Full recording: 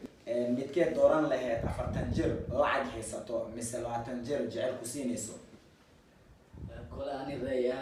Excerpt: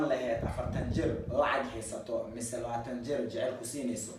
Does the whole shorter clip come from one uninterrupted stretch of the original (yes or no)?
yes